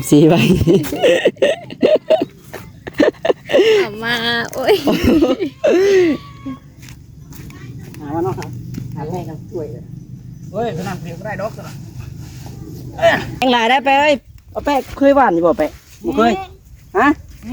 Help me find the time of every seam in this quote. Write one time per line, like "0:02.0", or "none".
0:13.4